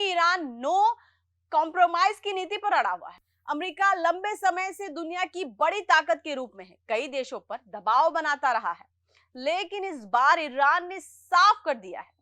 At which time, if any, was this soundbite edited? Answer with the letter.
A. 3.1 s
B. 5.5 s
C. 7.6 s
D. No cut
A